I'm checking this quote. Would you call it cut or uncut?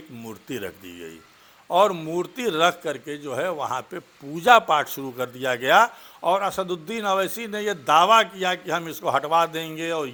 uncut